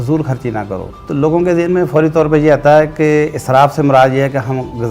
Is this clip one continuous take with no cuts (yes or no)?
no